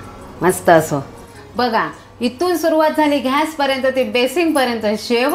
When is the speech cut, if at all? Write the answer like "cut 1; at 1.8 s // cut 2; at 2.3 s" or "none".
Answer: cut 1; at 1.2 s